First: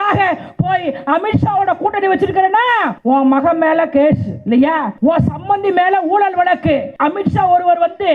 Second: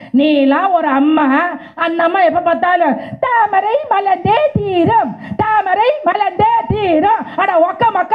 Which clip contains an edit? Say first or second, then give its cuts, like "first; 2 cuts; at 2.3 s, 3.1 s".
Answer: first; 3 cuts; at 2.9 s, 4.9 s, 6.9 s